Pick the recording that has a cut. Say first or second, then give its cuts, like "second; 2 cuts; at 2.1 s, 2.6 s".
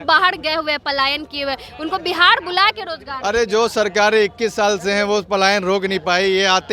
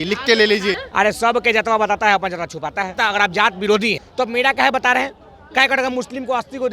second; 3 cuts; at 0.8 s, 2.9 s, 4.0 s